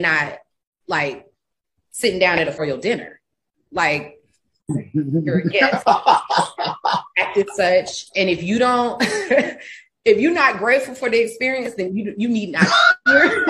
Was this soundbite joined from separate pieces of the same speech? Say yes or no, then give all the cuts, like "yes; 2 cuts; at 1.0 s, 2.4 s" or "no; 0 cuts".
yes; 1 cut; at 2.6 s